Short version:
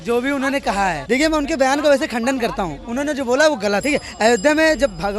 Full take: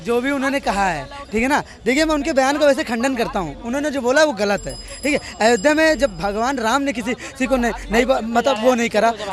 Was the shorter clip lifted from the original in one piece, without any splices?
no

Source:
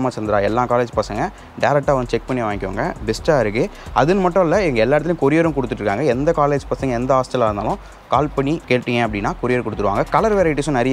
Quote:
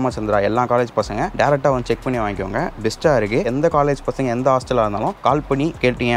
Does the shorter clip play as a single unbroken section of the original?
no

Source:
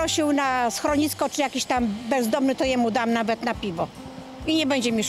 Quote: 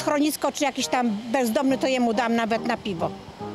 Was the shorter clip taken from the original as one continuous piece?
yes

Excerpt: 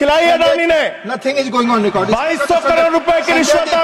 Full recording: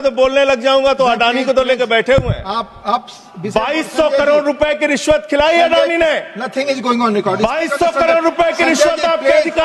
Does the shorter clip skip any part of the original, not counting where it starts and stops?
no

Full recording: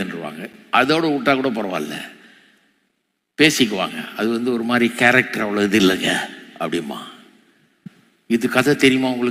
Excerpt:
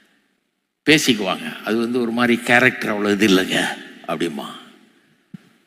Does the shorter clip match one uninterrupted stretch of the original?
yes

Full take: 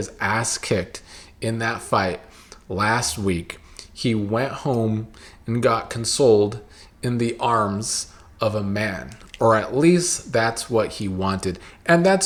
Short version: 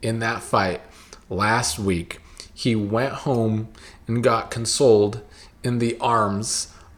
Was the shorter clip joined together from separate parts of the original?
no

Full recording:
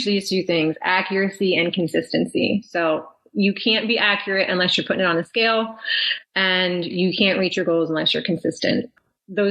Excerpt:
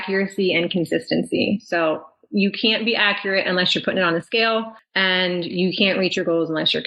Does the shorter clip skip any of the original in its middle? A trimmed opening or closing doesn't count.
yes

